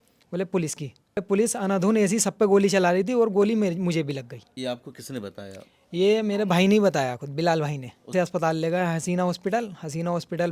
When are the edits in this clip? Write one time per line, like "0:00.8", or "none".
0:01.2
0:04.4
0:08.1